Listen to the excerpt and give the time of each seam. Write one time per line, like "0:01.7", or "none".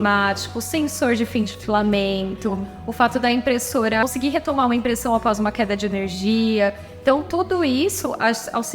0:04.0